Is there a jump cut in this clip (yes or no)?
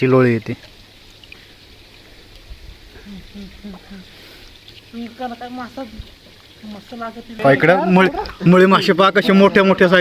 yes